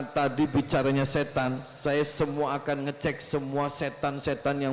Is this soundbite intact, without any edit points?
yes; 0 cuts

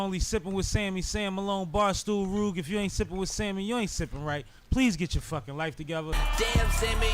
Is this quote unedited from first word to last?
no; 1 cut; at 6.2 s

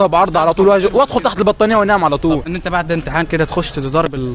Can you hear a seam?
yes; 1 cut; at 2.5 s

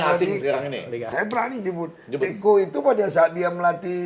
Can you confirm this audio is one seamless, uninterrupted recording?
no; 1 cut; at 1.1 s

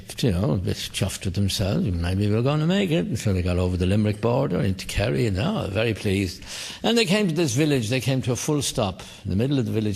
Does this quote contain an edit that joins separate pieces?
yes; 1 cut; at 3.4 s

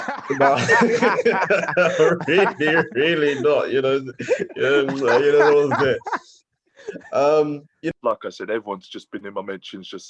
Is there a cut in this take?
yes; 1 cut; at 7.9 s

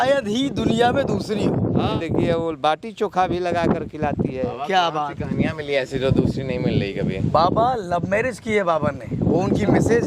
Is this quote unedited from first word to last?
no; 1 cut; at 2.0 s

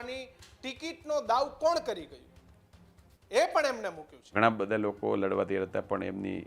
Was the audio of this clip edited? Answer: yes; 1 cut; at 4.3 s

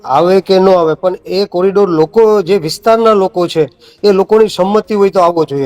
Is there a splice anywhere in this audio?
no; 0 cuts

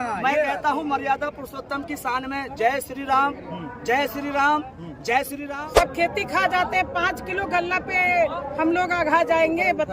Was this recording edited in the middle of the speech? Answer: yes; 1 cut; at 5.4 s

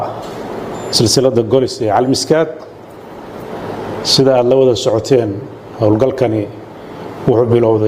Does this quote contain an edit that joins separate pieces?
no; 0 cuts

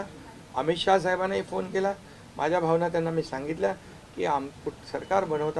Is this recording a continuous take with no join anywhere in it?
yes; 0 cuts

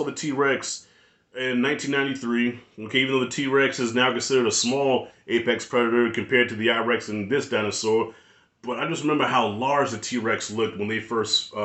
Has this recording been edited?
no; 0 cuts

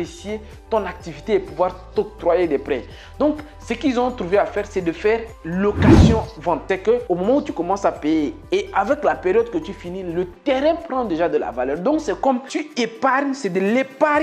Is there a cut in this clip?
yes; 1 cut; at 6.6 s

